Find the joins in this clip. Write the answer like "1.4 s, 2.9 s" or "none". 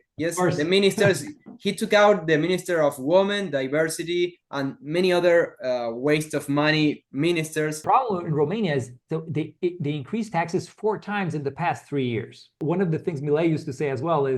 7.8 s, 12.6 s